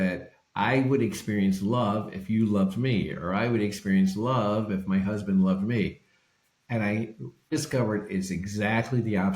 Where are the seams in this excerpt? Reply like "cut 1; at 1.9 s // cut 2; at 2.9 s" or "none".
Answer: cut 1; at 7.5 s

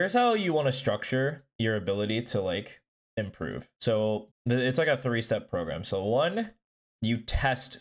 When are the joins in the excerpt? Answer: cut 1; at 3.7 s // cut 2; at 4.3 s

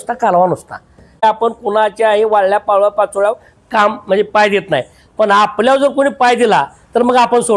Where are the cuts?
cut 1; at 1.2 s

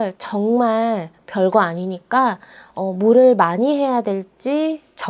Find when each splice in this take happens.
none

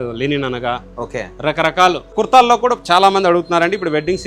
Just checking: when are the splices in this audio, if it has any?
cut 1; at 2.1 s

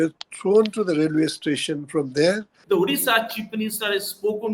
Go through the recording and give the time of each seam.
cut 1; at 2.5 s

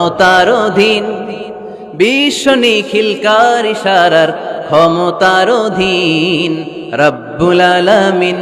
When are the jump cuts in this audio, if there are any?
none

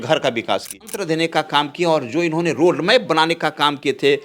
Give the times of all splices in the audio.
cut 1; at 0.9 s

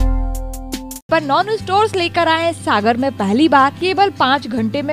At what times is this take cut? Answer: cut 1; at 1.1 s // cut 2; at 3.8 s

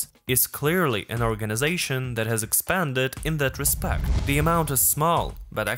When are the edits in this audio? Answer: cut 1; at 4.1 s

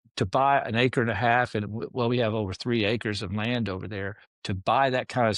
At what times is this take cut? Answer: cut 1; at 4.3 s

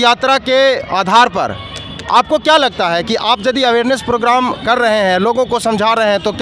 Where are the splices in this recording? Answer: none

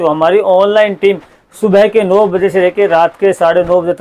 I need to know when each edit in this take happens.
none

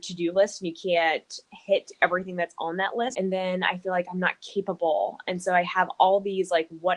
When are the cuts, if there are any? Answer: cut 1; at 3.1 s

